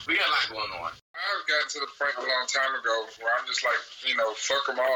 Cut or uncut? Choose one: cut